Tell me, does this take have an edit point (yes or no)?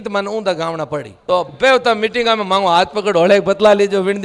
yes